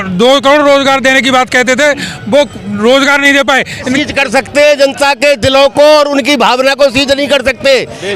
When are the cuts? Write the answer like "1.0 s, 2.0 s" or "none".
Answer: 3.9 s